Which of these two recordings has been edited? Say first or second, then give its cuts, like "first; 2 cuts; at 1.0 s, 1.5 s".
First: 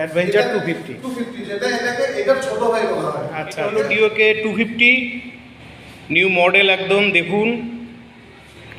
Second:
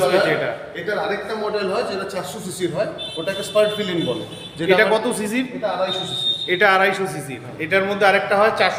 first; 1 cut; at 3.7 s